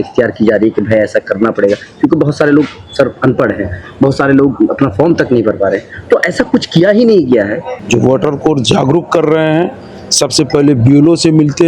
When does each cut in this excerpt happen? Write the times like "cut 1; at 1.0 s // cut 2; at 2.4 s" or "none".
cut 1; at 7.7 s

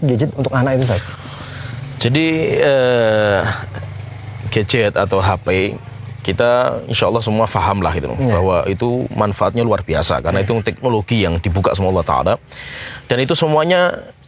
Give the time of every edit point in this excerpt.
none

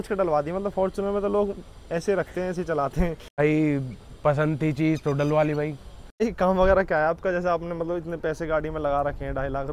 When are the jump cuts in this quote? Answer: cut 1; at 3.4 s // cut 2; at 6.2 s

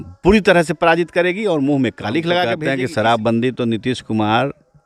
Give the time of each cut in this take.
cut 1; at 2.6 s

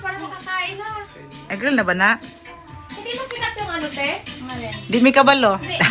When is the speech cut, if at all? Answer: none

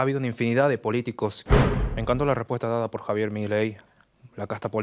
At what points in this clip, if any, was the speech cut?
cut 1; at 1.4 s // cut 2; at 3.9 s

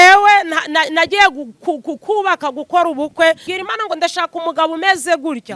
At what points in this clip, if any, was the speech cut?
cut 1; at 3.5 s

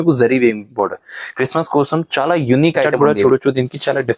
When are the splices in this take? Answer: cut 1; at 2.9 s

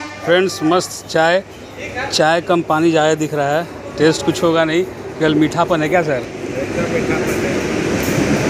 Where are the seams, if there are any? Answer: none

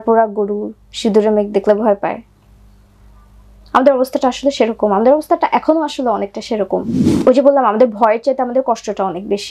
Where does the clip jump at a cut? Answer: cut 1; at 7.0 s

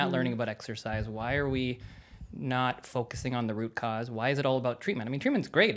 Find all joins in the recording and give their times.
none

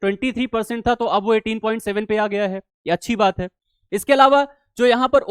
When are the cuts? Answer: none

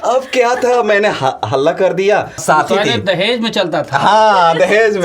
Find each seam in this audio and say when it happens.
cut 1; at 2.4 s

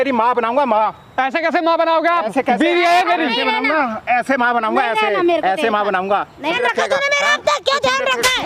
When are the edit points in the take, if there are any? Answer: cut 1; at 6.4 s

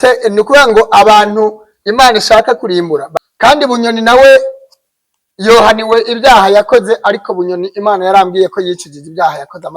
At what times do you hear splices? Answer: cut 1; at 3.1 s

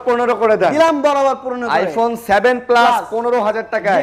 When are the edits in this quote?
none

